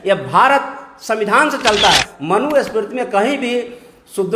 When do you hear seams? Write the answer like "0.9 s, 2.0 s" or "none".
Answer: 2.1 s